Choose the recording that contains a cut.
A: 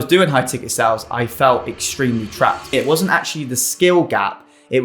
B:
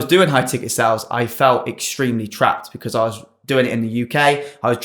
A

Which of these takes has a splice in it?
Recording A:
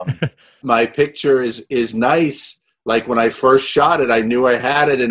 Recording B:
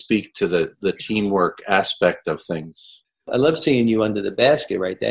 B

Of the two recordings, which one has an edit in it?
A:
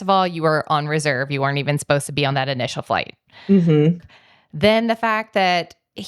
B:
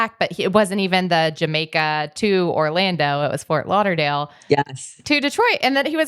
A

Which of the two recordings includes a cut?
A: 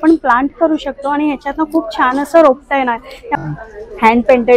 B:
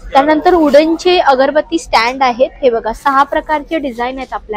A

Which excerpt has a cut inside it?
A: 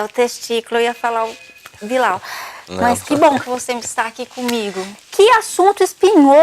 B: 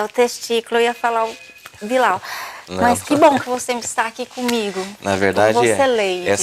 A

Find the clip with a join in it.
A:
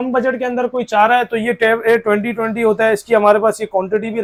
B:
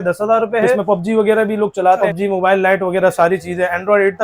B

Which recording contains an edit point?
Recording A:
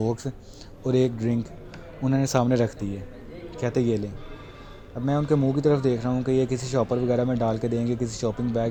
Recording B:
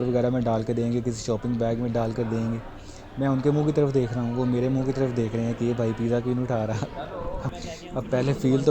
B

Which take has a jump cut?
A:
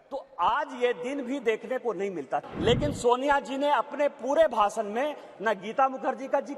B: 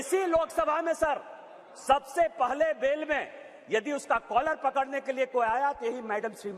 A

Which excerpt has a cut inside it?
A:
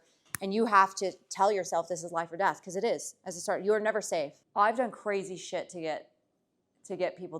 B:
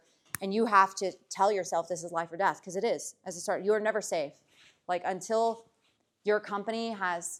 A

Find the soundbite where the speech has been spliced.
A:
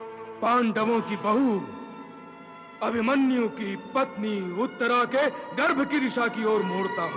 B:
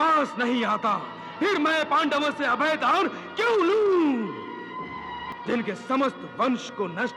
B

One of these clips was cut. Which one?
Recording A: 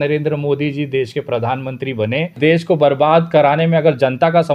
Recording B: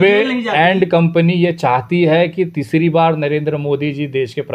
A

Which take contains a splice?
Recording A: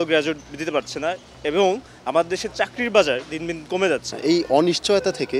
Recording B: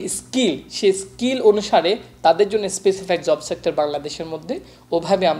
A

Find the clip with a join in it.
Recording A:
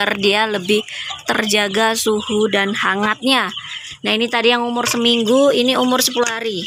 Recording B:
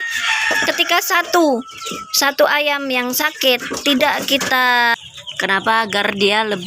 B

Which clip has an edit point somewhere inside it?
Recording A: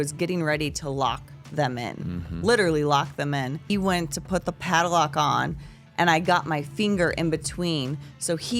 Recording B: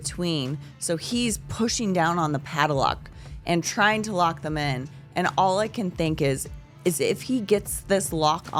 A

